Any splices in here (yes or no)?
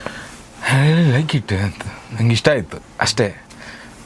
no